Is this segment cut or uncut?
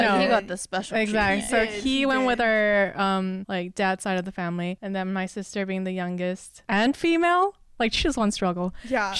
cut